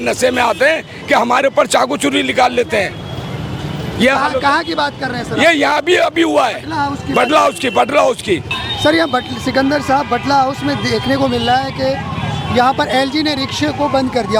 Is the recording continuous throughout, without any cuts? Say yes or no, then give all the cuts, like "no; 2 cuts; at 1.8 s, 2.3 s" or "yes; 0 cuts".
yes; 0 cuts